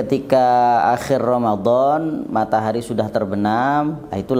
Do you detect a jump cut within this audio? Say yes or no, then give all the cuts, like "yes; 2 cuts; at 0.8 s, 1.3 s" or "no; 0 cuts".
no; 0 cuts